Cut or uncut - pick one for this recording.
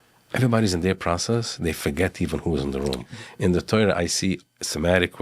cut